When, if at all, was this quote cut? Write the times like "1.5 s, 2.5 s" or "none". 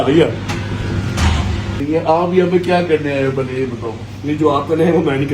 1.8 s